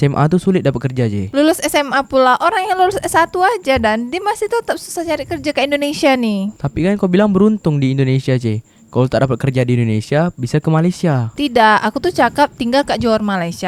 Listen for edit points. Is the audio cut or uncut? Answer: uncut